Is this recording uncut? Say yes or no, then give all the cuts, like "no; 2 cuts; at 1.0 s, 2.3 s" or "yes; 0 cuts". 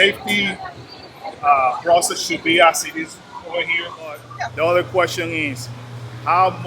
no; 1 cut; at 4.3 s